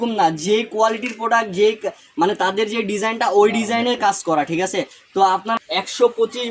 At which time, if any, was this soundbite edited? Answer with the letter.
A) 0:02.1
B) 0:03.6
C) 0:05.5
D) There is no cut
C